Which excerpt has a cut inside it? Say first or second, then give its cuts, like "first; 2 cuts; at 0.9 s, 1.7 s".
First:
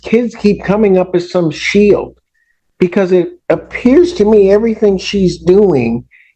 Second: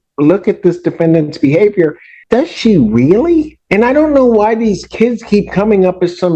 second; 2 cuts; at 2.1 s, 3.6 s